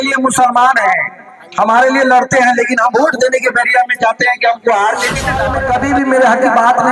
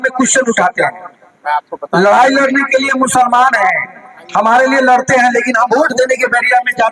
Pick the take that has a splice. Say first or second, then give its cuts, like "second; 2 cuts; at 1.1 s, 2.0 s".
first; 1 cut; at 5.4 s